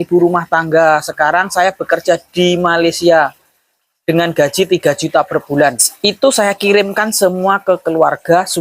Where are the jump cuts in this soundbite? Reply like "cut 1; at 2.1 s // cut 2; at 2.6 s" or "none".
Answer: cut 1; at 5.9 s